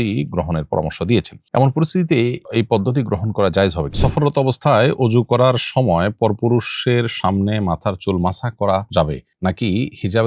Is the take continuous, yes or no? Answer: no